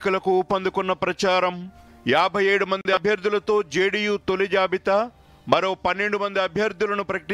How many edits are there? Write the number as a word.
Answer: zero